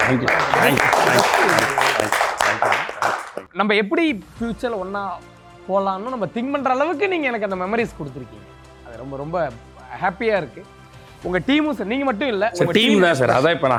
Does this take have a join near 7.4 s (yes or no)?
no